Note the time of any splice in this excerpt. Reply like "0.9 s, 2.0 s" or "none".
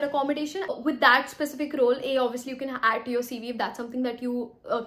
none